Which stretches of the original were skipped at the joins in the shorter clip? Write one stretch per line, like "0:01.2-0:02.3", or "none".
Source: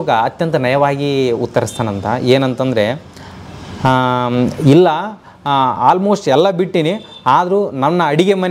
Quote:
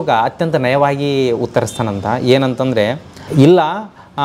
0:03.3-0:04.6